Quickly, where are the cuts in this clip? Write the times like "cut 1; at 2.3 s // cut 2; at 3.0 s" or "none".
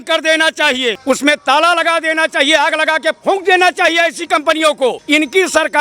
cut 1; at 1.0 s // cut 2; at 5.0 s